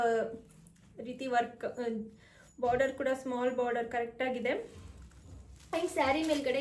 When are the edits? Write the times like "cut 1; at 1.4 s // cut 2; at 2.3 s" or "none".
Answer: none